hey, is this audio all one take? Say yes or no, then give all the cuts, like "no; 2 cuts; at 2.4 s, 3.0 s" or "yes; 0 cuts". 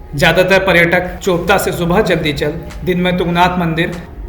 no; 1 cut; at 1.1 s